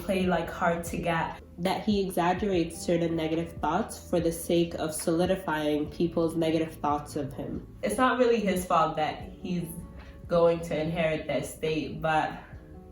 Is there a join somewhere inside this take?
yes; 2 cuts; at 1.4 s, 7.7 s

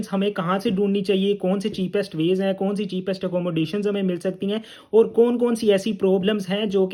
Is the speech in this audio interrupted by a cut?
no; 0 cuts

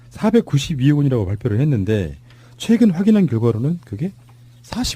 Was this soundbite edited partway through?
no; 0 cuts

